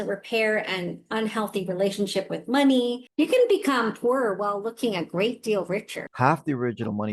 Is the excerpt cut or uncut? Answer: cut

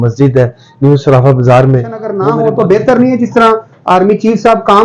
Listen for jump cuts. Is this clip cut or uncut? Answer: cut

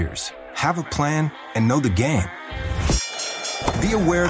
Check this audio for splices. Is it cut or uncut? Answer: uncut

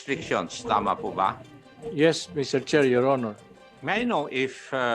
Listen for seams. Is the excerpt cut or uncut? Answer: cut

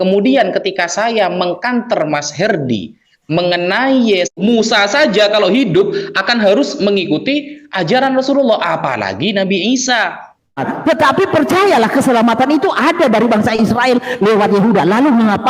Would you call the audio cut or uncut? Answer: cut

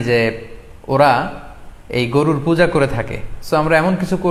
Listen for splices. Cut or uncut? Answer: uncut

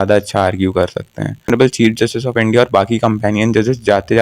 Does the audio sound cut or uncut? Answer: cut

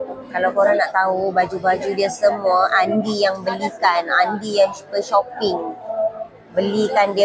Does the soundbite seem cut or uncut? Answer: uncut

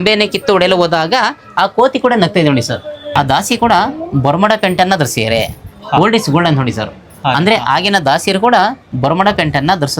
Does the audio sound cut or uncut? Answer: cut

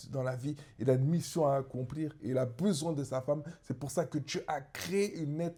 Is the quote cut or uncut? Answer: uncut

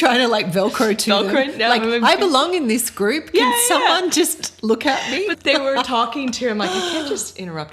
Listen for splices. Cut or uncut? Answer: uncut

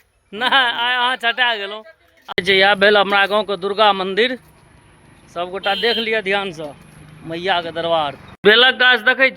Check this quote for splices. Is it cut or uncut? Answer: cut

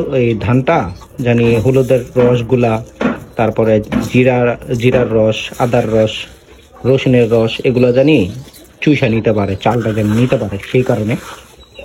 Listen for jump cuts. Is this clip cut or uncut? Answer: uncut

